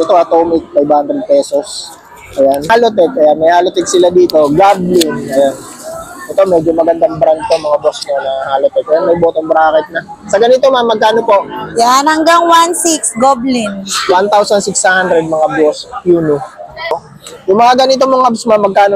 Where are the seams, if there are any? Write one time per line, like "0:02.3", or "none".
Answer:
0:02.7
0:17.1